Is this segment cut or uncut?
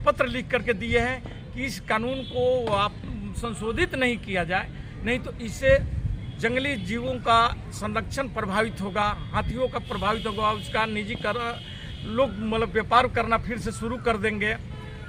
uncut